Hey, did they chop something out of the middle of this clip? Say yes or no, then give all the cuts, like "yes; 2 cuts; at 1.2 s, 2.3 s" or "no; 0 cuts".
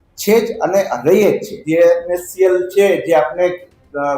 yes; 1 cut; at 1.5 s